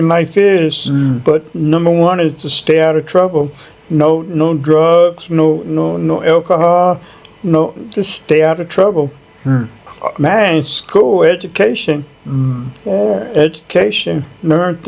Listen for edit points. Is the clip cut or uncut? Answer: uncut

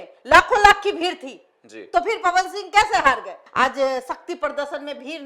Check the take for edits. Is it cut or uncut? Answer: uncut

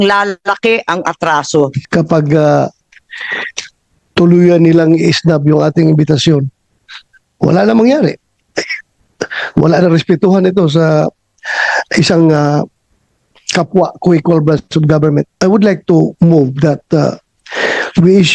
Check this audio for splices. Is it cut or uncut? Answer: cut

